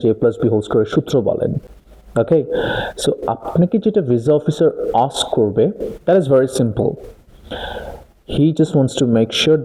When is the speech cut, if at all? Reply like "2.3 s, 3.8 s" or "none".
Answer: none